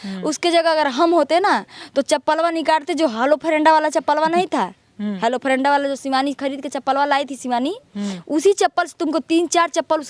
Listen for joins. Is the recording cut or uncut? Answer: uncut